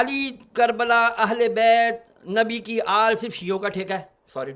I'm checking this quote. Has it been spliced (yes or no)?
no